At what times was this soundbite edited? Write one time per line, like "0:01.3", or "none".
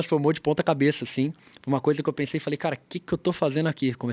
0:01.5

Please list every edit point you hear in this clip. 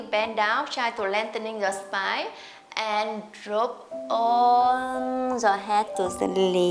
none

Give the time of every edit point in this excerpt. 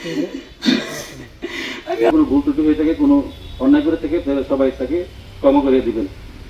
0:02.1

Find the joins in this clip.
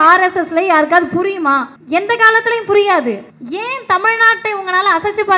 0:01.7
0:03.3

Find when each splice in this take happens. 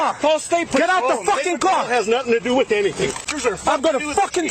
0:03.3

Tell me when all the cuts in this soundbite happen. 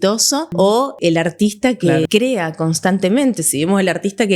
0:00.9
0:02.1

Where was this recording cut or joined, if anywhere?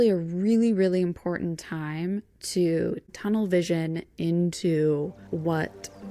0:05.2

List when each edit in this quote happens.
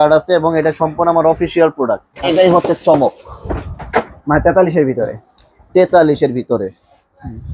0:02.1

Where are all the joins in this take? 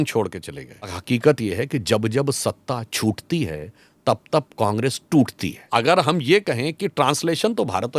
0:01.0
0:05.7

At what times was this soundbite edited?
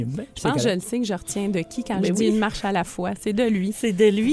none

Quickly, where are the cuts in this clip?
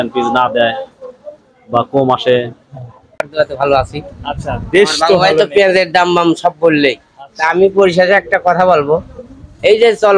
0:03.3

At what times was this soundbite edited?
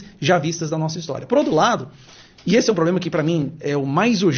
none

